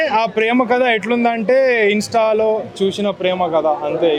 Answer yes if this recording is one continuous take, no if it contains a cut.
yes